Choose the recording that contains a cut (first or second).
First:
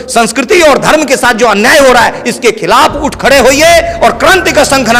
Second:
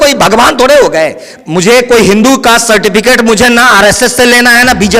second